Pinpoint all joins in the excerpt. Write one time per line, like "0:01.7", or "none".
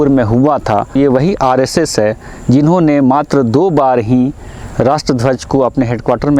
0:00.9